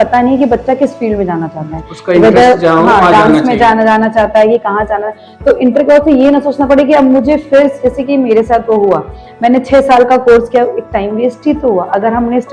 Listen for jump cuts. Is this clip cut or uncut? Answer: uncut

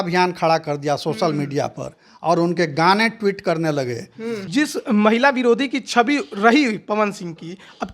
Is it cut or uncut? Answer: cut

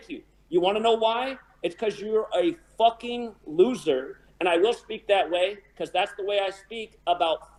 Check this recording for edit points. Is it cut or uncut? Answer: uncut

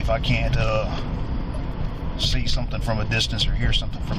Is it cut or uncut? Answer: cut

